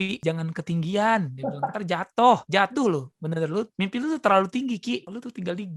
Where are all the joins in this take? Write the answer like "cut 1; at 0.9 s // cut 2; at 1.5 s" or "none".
none